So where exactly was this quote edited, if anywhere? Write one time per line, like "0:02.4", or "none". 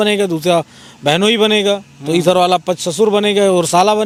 none